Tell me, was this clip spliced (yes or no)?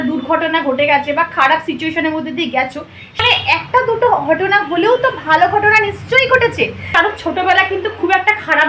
yes